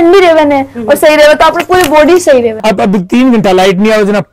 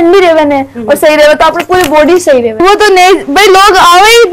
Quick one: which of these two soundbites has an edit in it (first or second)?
first